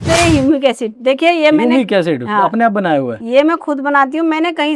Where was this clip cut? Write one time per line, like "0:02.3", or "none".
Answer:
none